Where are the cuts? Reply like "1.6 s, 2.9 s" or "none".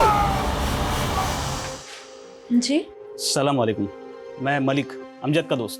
1.5 s